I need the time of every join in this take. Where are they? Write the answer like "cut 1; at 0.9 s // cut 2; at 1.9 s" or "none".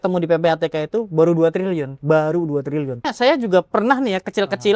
cut 1; at 3.0 s

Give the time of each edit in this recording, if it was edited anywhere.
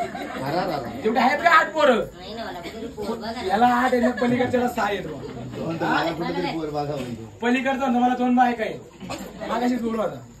none

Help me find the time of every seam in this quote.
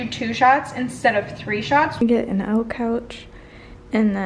cut 1; at 2.0 s

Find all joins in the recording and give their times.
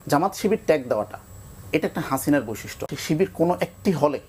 cut 1; at 2.9 s

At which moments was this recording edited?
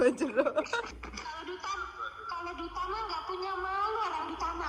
cut 1; at 0.9 s

